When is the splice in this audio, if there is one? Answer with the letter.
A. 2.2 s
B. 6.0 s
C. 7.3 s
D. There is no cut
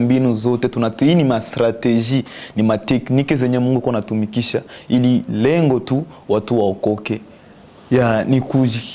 C